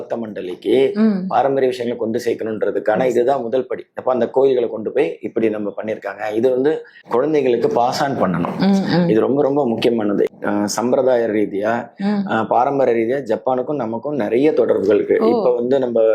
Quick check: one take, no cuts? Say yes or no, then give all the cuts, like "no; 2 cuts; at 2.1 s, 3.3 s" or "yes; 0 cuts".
no; 2 cuts; at 6.9 s, 10.4 s